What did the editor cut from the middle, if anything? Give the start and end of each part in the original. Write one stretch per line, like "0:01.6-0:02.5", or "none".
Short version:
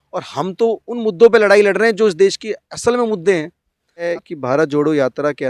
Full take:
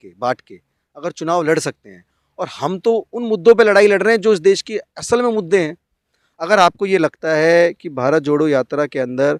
0:06.3-0:07.6